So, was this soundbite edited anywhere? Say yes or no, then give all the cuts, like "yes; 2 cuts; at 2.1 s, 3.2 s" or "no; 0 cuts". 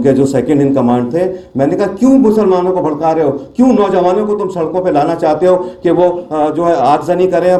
no; 0 cuts